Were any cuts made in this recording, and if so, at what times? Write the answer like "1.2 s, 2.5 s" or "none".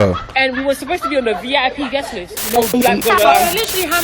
2.4 s